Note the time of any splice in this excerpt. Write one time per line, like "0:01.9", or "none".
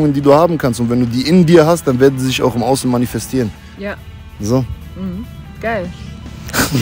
none